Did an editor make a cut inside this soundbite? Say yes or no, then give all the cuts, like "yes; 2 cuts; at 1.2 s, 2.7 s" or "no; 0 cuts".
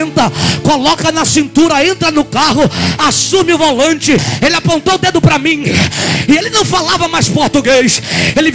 yes; 1 cut; at 4.3 s